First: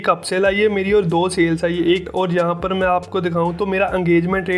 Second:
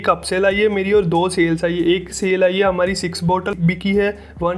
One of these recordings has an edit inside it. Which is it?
first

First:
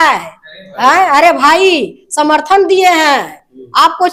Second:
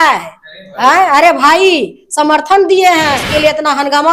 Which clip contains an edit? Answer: second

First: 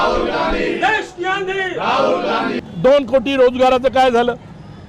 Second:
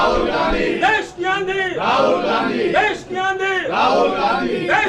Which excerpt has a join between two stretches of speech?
first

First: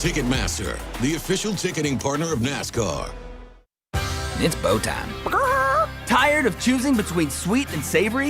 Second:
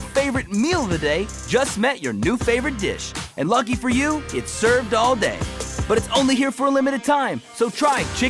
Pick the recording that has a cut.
first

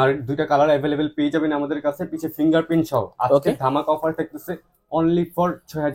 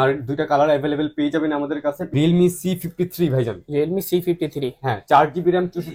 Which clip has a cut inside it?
second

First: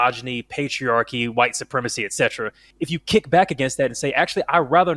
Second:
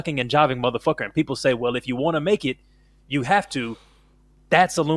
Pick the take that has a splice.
first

